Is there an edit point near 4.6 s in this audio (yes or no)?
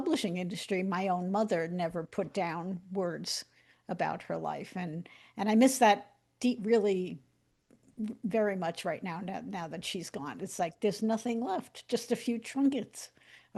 no